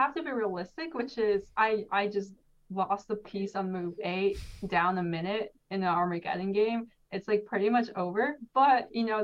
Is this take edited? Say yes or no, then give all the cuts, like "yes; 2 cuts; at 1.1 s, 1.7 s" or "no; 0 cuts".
no; 0 cuts